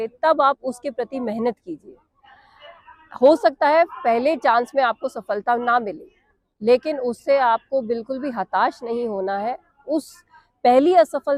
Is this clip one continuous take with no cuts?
yes; 0 cuts

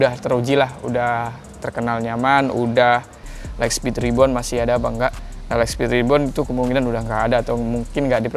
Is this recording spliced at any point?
yes; 1 cut; at 3.2 s

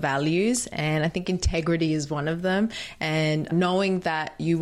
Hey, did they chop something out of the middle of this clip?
yes; 1 cut; at 3.5 s

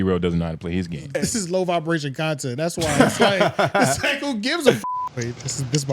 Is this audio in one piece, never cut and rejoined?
no; 2 cuts; at 1.1 s, 4.8 s

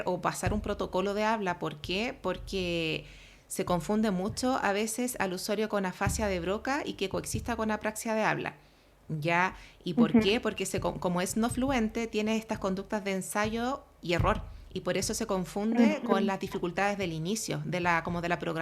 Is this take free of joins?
yes; 0 cuts

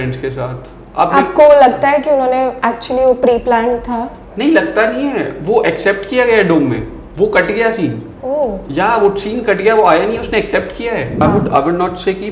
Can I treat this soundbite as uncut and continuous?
no; 1 cut; at 11.1 s

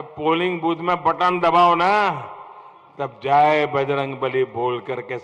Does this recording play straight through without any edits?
yes; 0 cuts

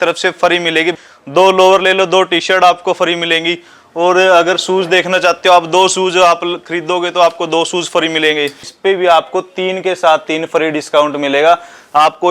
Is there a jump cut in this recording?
yes; 2 cuts; at 0.9 s, 8.7 s

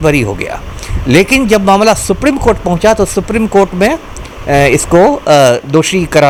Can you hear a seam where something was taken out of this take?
no; 0 cuts

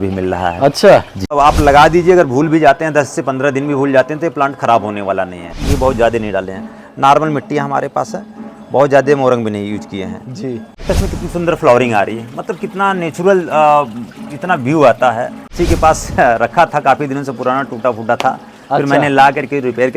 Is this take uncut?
no; 4 cuts; at 1.4 s, 5.6 s, 10.8 s, 15.5 s

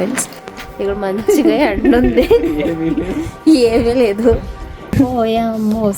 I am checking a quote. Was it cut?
yes; 1 cut; at 5.1 s

